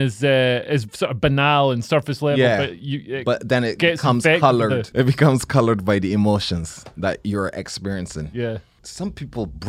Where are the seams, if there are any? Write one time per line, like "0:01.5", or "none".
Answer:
0:04.9
0:08.8